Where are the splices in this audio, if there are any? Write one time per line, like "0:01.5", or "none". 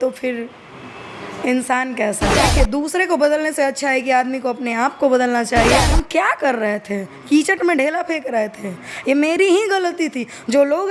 0:02.5
0:05.9